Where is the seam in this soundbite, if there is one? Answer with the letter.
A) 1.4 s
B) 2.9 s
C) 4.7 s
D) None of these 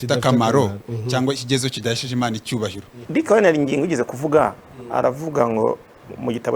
B